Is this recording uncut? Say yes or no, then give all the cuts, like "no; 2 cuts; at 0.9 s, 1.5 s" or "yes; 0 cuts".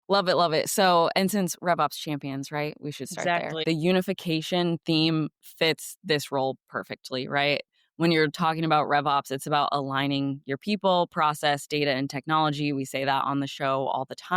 no; 1 cut; at 3.6 s